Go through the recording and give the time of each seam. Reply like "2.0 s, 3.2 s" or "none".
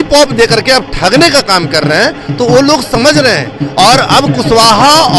none